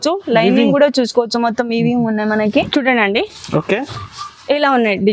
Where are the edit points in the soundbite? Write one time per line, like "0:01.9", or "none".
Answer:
0:02.5